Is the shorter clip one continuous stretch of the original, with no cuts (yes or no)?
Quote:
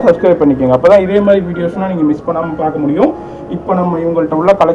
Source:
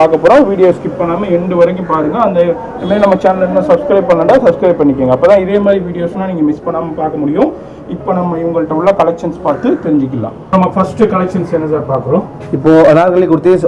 yes